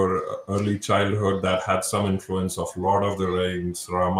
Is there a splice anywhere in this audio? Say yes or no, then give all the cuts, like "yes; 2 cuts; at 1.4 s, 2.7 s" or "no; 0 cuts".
no; 0 cuts